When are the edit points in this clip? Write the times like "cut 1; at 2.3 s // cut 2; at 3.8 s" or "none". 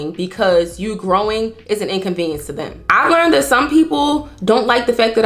none